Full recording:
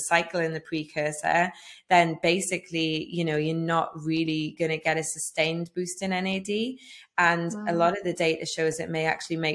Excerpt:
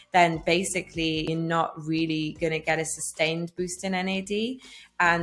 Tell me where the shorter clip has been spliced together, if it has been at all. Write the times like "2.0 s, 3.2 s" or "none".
1.3 s